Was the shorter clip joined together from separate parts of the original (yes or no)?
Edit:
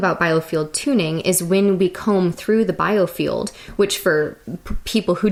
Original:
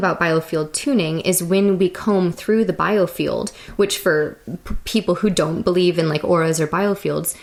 no